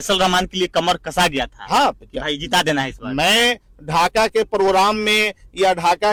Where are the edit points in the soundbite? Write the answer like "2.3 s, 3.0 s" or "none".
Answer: none